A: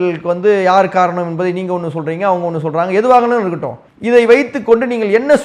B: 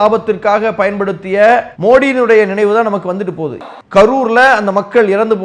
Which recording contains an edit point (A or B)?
B